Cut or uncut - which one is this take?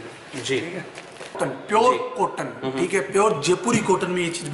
cut